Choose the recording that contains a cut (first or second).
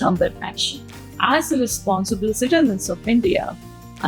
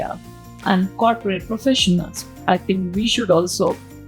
first